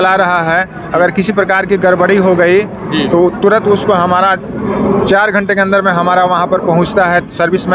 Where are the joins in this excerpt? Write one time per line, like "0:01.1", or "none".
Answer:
none